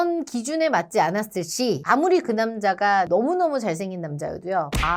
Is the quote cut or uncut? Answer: uncut